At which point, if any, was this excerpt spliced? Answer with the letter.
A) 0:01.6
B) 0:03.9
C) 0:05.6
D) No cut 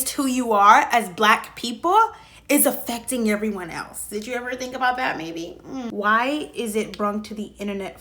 C